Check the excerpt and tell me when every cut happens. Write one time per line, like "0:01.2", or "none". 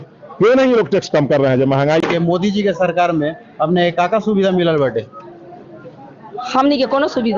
0:02.0